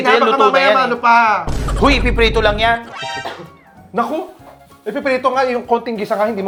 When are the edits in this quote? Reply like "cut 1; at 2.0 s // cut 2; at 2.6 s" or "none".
none